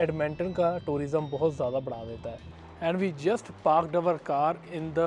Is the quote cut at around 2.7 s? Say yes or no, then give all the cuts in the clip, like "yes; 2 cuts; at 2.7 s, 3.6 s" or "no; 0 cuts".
yes; 1 cut; at 2.7 s